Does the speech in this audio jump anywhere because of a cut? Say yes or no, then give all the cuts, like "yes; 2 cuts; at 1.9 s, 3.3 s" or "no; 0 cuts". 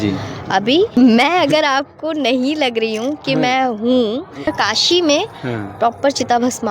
yes; 2 cuts; at 0.9 s, 4.5 s